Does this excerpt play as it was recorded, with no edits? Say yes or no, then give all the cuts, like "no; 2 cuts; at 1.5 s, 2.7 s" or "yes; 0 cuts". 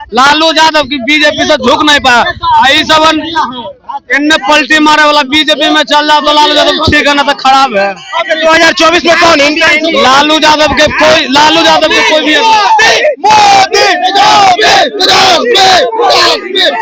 yes; 0 cuts